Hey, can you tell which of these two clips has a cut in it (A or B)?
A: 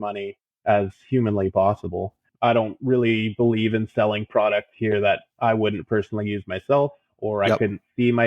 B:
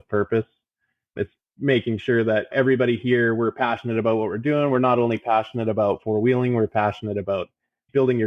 A